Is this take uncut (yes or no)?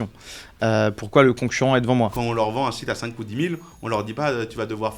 no